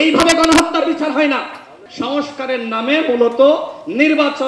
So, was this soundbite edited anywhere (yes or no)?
yes